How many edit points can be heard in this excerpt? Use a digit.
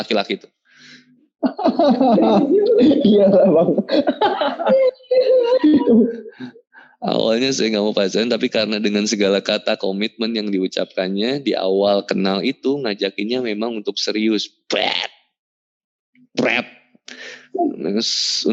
0